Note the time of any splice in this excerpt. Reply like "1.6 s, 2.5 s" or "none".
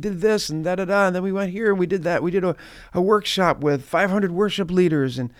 none